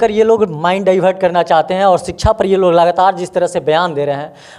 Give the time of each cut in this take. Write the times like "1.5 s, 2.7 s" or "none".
none